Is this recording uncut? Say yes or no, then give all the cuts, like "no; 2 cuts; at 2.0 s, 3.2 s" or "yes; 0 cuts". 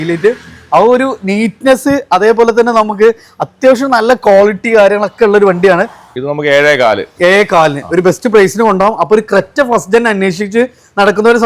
no; 1 cut; at 6.0 s